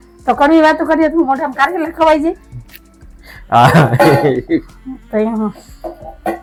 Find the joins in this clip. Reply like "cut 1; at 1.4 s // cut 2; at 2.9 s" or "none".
none